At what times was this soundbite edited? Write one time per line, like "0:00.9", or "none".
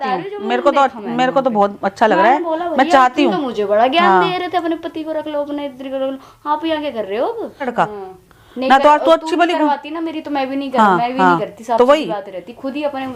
0:07.7